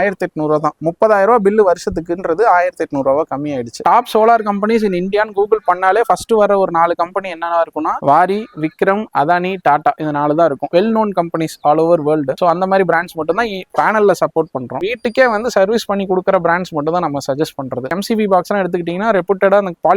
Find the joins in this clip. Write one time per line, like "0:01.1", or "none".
0:03.8
0:10.7
0:14.8
0:18.0